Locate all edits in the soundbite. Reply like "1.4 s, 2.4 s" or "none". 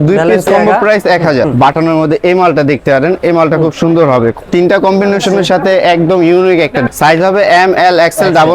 1.5 s, 4.4 s, 6.9 s